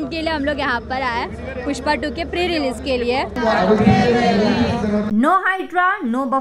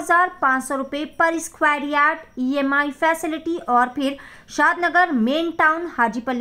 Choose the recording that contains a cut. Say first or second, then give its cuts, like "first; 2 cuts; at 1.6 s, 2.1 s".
first; 2 cuts; at 3.3 s, 5.1 s